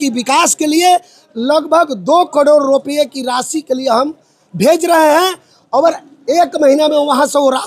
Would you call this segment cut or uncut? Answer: uncut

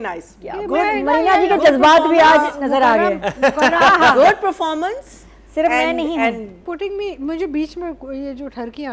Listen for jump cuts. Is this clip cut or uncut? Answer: cut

